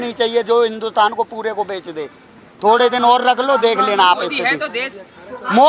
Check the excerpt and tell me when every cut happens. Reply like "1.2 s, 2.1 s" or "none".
none